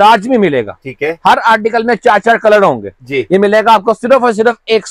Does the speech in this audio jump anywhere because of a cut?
no; 0 cuts

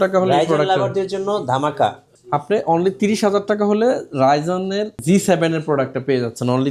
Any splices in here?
yes; 1 cut; at 4.9 s

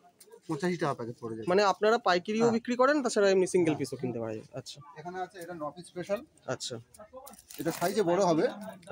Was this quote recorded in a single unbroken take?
yes; 0 cuts

